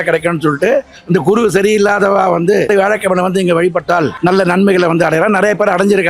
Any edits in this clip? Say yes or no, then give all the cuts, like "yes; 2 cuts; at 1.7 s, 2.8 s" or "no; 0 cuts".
yes; 2 cuts; at 2.7 s, 4.1 s